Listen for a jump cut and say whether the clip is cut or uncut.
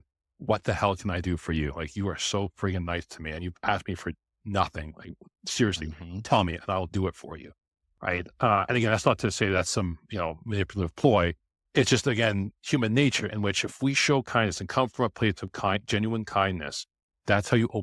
uncut